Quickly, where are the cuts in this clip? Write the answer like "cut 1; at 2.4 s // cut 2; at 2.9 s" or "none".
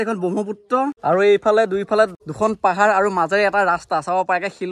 cut 1; at 1.0 s // cut 2; at 2.2 s